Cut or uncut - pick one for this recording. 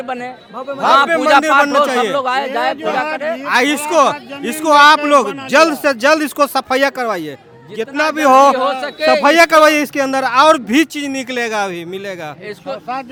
uncut